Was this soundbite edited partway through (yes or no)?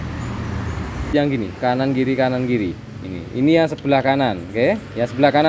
yes